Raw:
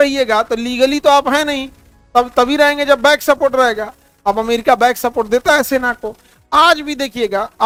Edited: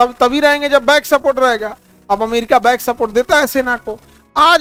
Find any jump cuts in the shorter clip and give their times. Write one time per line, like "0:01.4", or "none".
none